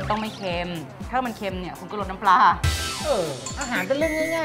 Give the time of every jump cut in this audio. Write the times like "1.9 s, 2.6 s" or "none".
1.1 s